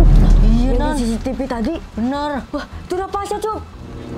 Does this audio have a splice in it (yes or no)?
yes